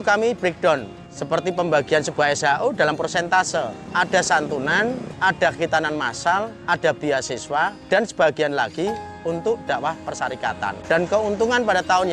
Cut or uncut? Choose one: cut